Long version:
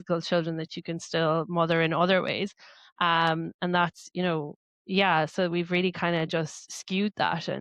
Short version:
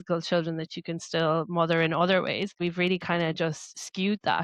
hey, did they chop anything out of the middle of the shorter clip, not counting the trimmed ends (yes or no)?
yes